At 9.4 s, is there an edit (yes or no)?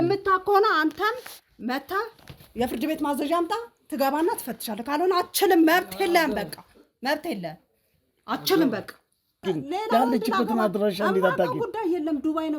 yes